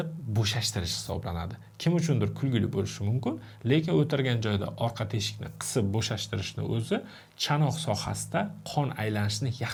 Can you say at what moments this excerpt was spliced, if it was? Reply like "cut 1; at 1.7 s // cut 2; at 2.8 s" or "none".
none